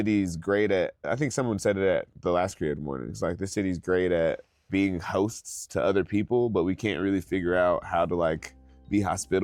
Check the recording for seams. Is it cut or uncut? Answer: cut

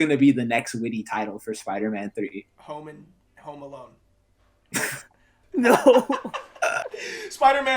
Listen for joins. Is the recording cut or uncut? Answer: cut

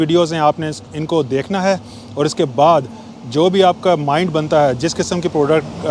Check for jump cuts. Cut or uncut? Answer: uncut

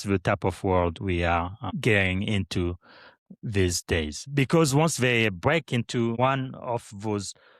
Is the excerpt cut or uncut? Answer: cut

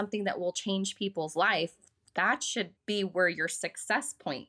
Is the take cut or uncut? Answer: uncut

